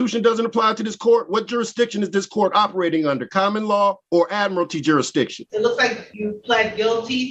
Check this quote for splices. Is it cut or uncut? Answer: cut